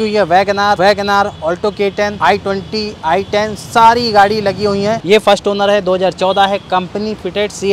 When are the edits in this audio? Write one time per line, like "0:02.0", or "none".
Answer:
0:00.8
0:02.1
0:05.0

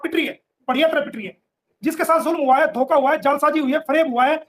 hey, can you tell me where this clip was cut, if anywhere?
0:01.6

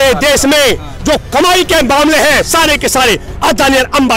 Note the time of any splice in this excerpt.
none

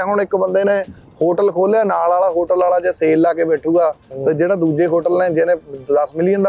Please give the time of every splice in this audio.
none

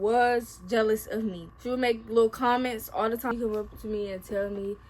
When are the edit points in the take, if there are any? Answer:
0:01.5
0:03.3

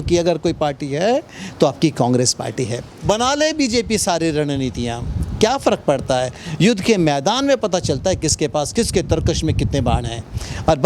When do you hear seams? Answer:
0:02.8

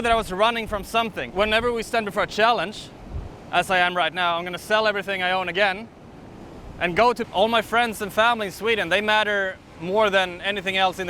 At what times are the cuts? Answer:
0:01.2
0:07.3

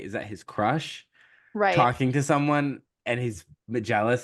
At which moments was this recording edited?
none

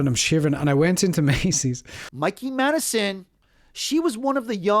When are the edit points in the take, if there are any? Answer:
0:01.9
0:03.2

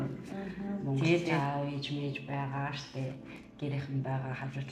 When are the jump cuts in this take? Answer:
0:01.4

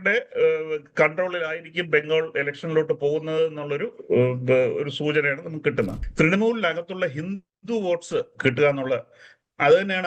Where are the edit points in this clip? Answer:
0:06.0

